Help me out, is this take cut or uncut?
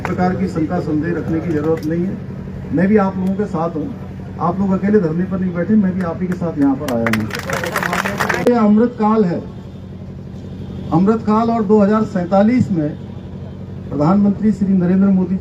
cut